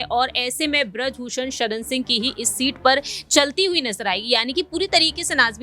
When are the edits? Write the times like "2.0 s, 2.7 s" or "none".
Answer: none